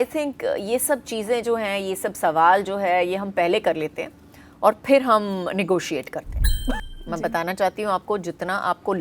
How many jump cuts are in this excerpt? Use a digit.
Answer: 1